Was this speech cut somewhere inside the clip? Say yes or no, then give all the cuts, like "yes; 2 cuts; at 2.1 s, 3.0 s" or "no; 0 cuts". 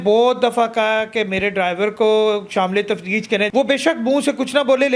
yes; 1 cut; at 3.5 s